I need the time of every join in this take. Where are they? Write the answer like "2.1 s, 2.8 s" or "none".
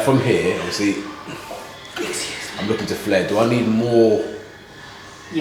none